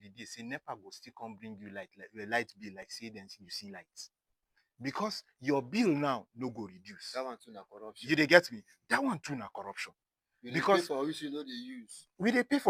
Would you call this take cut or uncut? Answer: uncut